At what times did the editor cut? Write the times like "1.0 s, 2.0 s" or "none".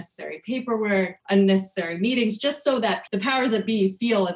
1.2 s, 3.0 s